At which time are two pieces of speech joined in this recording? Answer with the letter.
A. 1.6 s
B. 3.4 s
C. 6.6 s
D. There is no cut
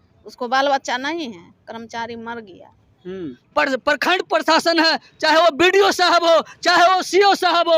B